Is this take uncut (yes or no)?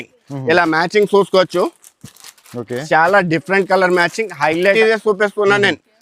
no